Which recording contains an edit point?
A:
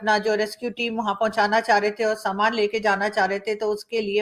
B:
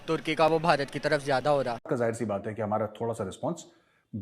B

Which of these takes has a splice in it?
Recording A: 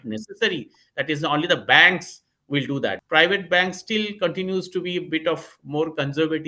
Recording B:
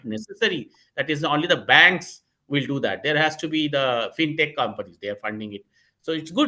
A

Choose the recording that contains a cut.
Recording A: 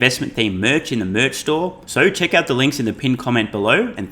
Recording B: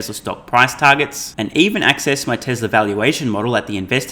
A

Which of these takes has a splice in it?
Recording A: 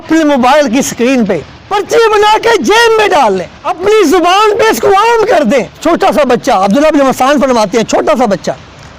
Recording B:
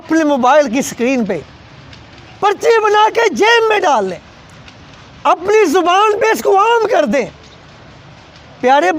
A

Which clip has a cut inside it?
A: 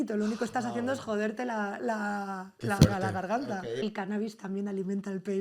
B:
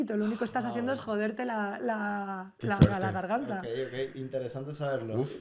A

